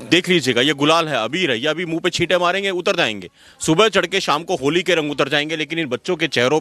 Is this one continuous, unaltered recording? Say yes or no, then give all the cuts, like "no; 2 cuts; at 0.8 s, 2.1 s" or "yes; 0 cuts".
yes; 0 cuts